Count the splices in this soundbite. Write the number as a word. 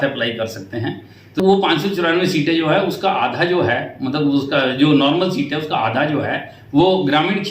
one